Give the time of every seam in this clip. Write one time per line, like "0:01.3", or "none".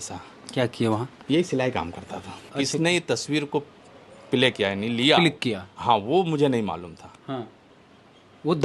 0:02.4